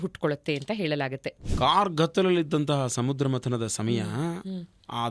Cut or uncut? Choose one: cut